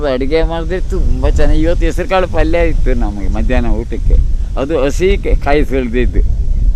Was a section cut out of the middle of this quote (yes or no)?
no